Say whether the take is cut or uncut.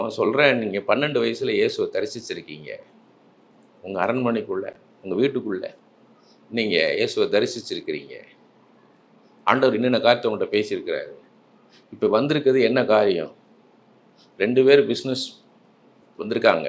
uncut